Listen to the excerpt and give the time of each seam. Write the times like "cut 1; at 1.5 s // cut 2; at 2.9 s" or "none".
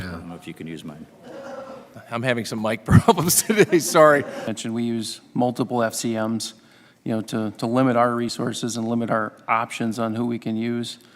cut 1; at 4.6 s